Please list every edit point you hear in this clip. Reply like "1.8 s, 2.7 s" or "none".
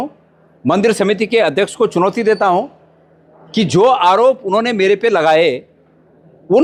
none